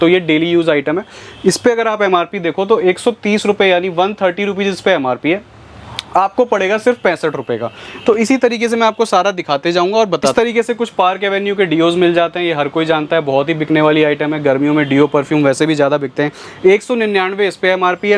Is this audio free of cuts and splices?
no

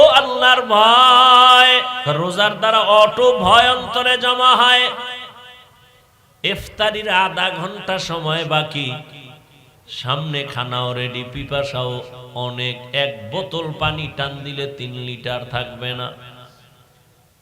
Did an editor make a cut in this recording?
yes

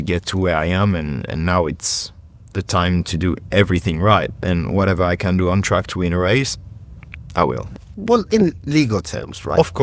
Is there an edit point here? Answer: no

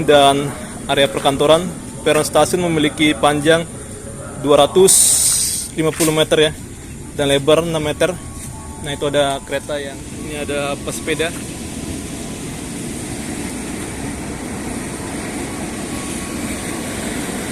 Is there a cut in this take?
yes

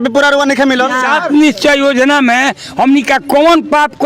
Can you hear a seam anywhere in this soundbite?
yes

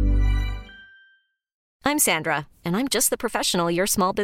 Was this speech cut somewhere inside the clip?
yes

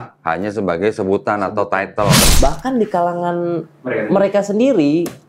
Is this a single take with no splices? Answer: no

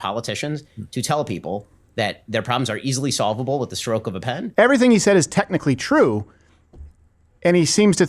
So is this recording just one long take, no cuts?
no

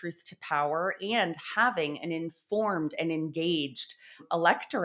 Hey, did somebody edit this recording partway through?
no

